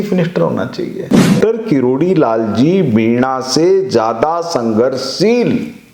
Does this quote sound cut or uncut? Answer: cut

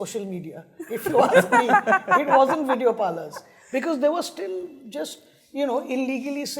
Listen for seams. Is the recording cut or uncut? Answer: uncut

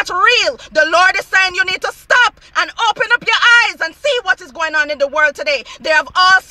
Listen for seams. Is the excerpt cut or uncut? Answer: uncut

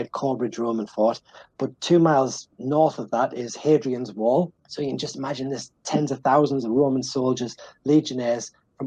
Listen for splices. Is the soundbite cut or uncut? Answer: uncut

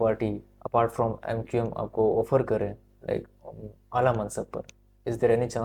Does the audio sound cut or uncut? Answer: uncut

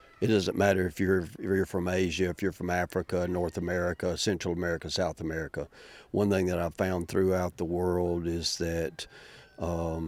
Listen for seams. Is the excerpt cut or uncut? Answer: uncut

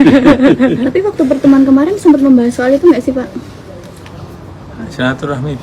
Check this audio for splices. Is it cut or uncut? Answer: uncut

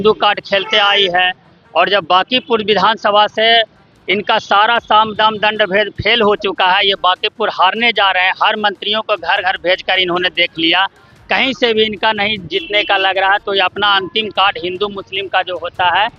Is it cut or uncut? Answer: uncut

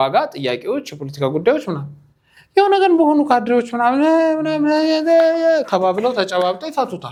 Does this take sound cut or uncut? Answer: uncut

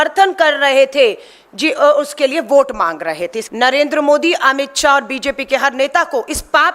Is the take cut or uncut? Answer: cut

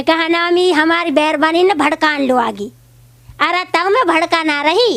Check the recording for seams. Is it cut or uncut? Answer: uncut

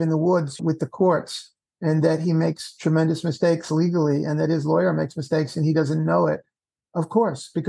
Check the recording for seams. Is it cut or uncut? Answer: uncut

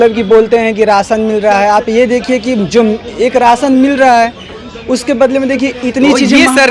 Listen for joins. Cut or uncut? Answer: uncut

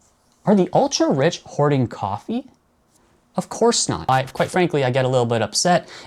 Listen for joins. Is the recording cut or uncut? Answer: cut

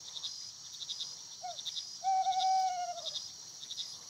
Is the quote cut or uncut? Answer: uncut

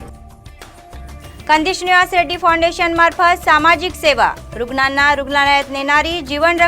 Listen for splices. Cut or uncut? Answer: cut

